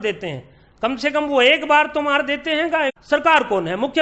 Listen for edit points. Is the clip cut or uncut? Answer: cut